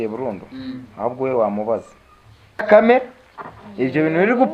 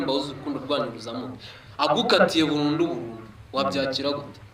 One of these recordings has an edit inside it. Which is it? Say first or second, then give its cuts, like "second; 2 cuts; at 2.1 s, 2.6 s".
first; 1 cut; at 2.6 s